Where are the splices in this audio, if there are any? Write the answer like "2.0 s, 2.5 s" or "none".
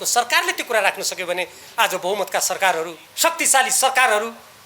3.0 s